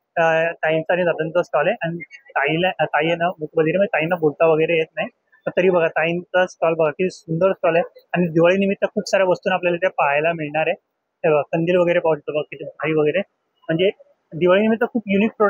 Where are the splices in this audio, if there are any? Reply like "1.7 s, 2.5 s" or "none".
none